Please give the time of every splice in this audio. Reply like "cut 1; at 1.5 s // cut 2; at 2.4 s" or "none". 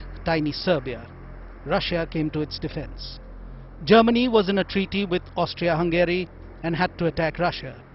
none